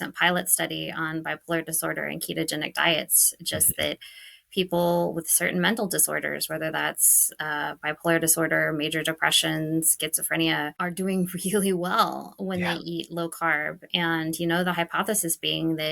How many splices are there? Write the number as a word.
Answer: one